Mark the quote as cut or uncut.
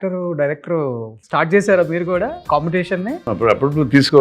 cut